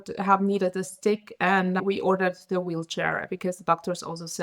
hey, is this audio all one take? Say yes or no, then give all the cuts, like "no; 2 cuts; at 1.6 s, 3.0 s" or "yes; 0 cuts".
no; 1 cut; at 1.8 s